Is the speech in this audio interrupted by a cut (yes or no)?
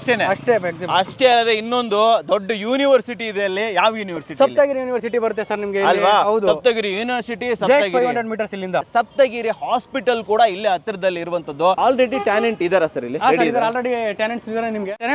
yes